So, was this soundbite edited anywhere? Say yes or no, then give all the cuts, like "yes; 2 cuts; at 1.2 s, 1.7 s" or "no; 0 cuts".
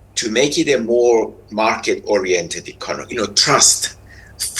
yes; 1 cut; at 3.1 s